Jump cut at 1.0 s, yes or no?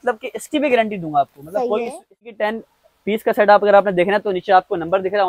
no